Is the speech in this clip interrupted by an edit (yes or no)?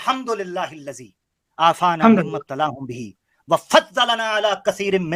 no